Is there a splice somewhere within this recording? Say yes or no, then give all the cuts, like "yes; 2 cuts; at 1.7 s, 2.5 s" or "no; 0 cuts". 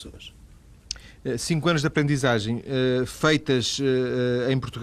yes; 1 cut; at 3.4 s